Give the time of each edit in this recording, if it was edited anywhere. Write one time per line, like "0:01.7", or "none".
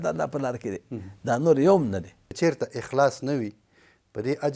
0:02.2